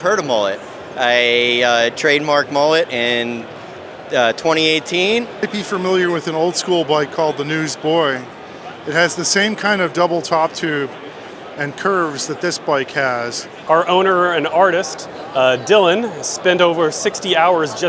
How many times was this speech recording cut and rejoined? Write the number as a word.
two